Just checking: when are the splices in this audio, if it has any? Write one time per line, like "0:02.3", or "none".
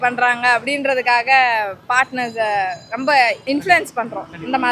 0:03.4